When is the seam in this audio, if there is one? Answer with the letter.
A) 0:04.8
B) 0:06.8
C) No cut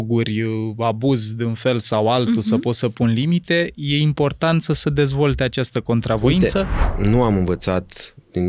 B